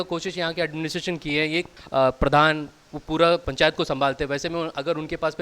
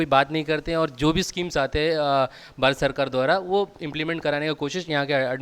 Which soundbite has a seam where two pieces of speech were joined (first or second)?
first